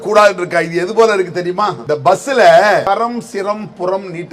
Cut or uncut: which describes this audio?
cut